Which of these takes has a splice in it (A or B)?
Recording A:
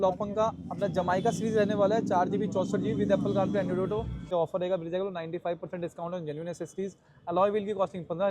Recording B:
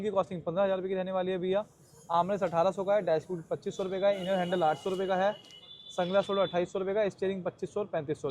A